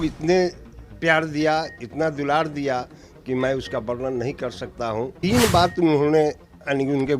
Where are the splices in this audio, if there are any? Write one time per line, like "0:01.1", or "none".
0:05.1